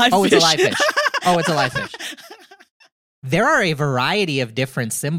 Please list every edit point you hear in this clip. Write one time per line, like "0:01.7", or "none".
0:02.7